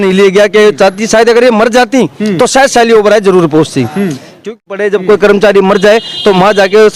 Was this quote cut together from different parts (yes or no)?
yes